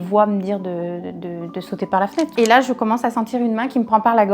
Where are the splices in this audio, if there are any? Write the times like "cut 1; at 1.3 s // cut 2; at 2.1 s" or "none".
cut 1; at 2.3 s